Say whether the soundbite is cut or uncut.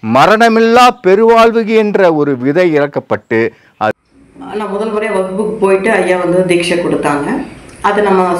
cut